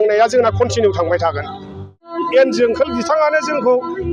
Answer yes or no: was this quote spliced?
yes